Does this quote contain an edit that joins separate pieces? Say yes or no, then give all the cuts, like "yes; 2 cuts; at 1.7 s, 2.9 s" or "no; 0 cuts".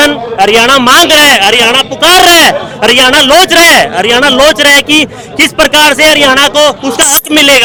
no; 0 cuts